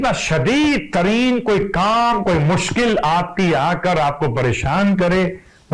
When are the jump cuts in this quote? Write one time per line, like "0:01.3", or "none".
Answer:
none

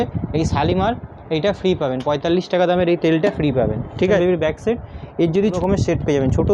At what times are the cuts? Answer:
0:04.2
0:05.6

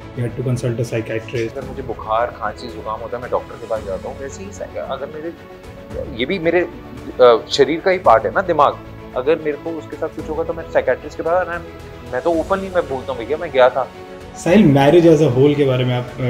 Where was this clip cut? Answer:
0:01.5
0:14.0

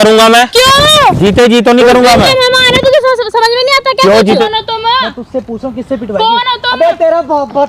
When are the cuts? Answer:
0:04.4

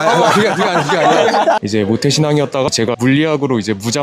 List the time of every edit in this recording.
0:01.6
0:02.8

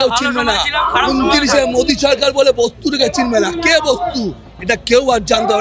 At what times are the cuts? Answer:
none

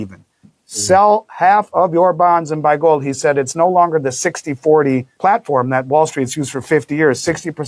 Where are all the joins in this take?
0:05.1

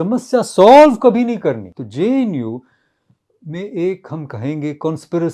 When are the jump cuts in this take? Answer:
0:01.7

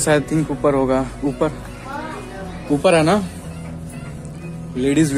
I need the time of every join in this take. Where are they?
none

